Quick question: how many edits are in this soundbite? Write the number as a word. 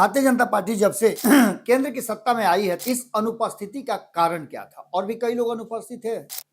two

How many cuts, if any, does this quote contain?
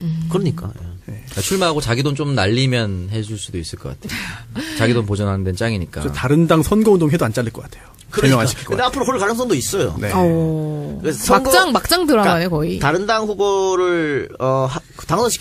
one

